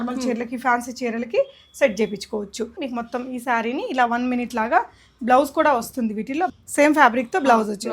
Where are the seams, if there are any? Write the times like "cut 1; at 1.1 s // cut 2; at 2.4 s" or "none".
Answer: cut 1; at 2.8 s // cut 2; at 6.5 s